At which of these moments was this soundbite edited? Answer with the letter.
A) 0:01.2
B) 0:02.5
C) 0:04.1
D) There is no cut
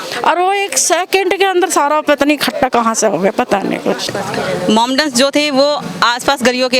C